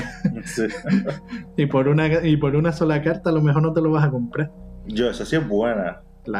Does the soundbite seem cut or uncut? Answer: uncut